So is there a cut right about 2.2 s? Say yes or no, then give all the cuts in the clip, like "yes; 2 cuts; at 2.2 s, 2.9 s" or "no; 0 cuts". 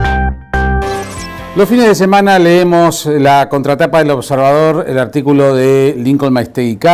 no; 1 cut; at 0.9 s